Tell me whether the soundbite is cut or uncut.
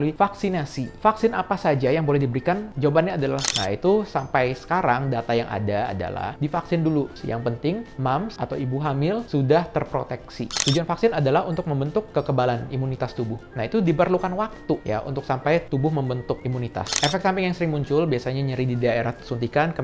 cut